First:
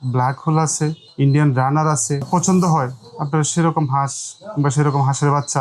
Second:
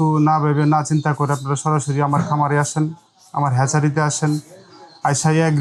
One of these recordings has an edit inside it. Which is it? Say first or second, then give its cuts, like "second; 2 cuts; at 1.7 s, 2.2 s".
first; 2 cuts; at 1.0 s, 2.2 s